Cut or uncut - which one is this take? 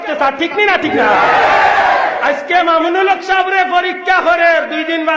uncut